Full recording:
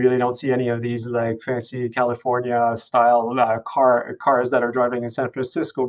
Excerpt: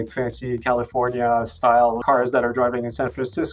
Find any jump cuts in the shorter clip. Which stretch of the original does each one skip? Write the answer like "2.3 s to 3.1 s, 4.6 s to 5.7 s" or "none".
3.3 s to 4.2 s